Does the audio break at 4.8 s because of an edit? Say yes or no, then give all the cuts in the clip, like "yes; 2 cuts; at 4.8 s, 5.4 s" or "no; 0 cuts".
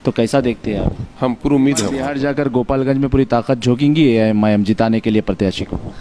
no; 1 cut; at 2.0 s